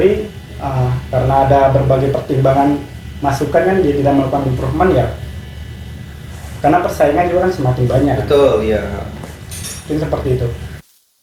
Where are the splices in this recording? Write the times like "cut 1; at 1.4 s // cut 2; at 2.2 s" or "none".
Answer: none